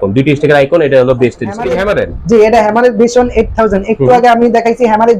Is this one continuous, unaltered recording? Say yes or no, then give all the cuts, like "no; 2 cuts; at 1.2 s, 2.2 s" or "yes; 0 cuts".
no; 1 cut; at 1.8 s